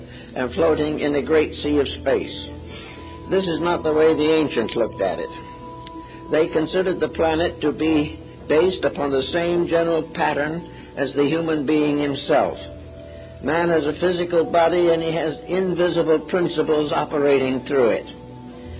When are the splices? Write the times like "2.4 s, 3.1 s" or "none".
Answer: 6.5 s